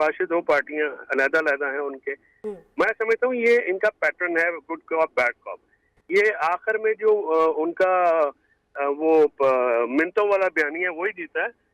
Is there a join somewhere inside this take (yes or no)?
no